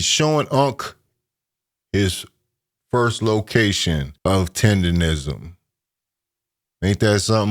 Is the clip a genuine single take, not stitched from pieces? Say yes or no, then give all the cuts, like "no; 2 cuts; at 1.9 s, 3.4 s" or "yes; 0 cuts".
no; 1 cut; at 4.1 s